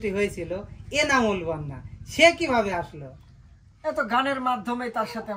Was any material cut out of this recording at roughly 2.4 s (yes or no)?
no